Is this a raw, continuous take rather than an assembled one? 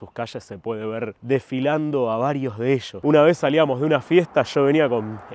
no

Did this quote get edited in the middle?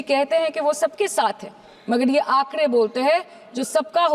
no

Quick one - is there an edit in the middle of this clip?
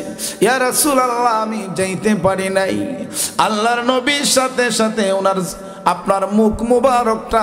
no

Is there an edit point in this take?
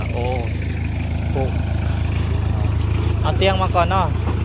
no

